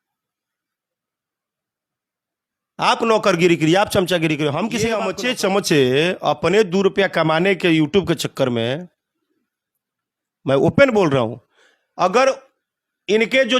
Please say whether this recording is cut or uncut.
cut